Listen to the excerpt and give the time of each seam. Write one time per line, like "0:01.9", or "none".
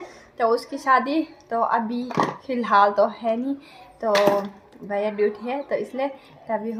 none